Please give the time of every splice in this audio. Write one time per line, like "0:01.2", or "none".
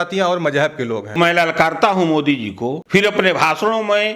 0:01.2
0:02.8